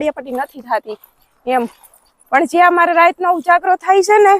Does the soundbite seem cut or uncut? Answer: cut